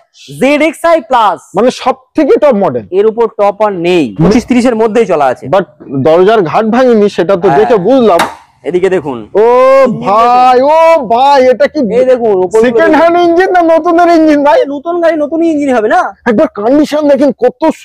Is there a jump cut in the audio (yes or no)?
yes